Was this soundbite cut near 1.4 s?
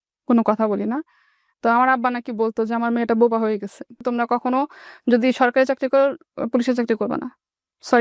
no; 1 cut; at 4.0 s

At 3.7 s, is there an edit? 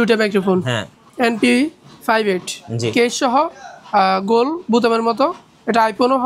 no; 1 cut; at 1.0 s

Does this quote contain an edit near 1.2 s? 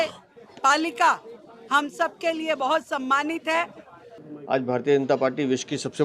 no; 1 cut; at 4.2 s

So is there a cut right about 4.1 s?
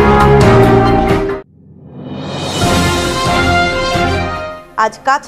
yes; 1 cut; at 4.1 s

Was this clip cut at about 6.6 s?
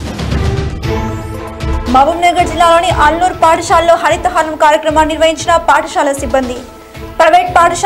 no; 1 cut; at 1.5 s

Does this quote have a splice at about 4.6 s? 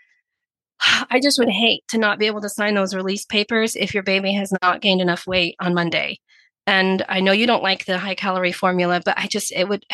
yes; 1 cut; at 4.6 s

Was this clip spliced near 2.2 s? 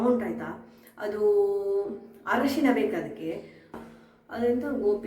no; 1 cut; at 3.7 s

